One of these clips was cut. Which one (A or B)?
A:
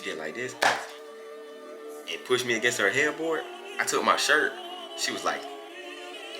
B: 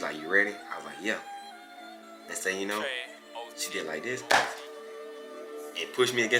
A